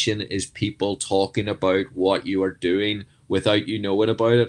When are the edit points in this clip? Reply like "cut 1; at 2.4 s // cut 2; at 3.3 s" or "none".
none